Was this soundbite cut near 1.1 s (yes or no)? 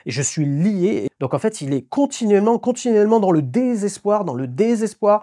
yes